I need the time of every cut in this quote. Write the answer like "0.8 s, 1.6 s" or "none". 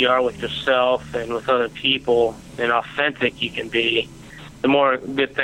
none